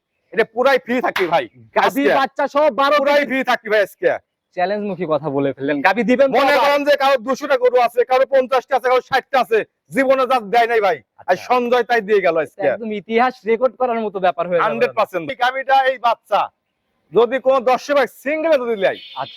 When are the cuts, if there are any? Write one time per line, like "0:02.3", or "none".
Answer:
0:15.3